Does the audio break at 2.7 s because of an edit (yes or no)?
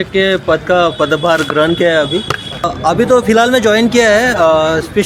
yes